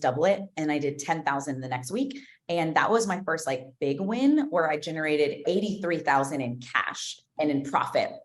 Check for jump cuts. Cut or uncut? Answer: cut